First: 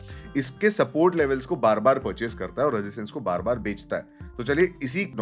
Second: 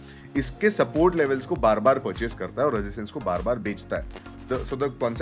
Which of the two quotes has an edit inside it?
second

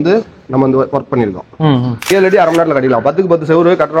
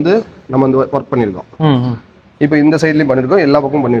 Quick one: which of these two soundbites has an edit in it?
first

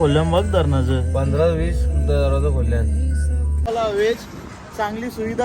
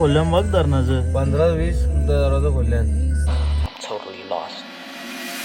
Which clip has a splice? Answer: first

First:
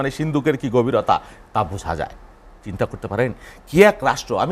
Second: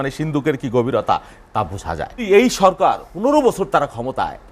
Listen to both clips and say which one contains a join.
second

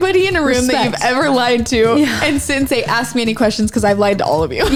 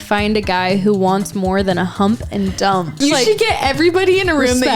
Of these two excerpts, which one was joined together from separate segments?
second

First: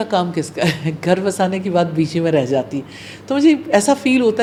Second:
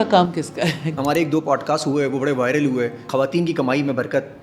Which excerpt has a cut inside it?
second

